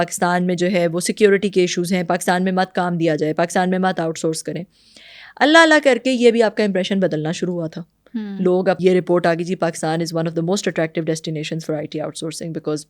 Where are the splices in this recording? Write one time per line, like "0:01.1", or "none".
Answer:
none